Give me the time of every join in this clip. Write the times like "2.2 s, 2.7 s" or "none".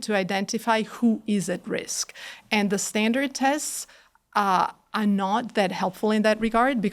none